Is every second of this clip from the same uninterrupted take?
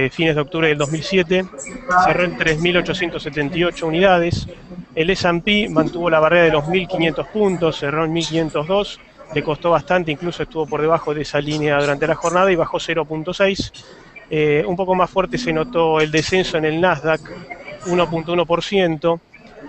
yes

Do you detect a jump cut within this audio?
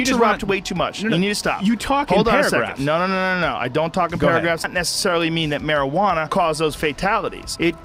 no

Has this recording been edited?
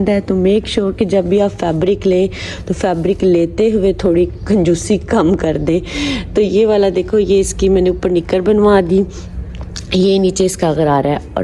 no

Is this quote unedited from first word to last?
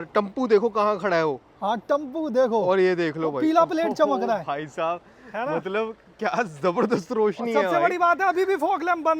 yes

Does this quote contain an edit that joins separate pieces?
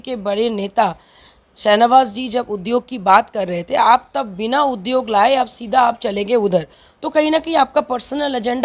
no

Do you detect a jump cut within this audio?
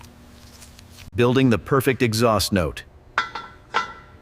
yes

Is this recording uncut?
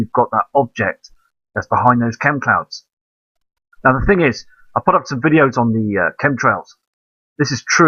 yes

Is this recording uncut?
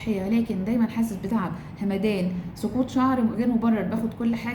yes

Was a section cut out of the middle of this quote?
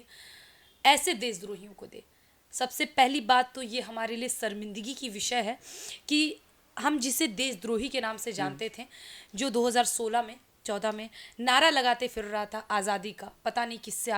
no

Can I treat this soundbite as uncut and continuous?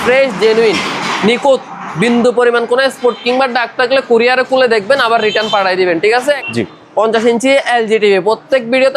no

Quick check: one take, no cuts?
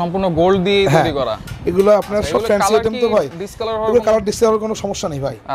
yes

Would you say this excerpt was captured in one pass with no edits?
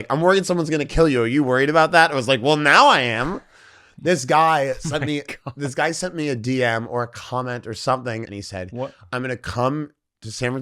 no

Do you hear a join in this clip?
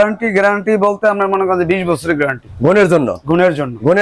no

